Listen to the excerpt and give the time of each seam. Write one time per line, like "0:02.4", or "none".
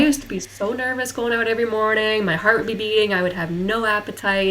none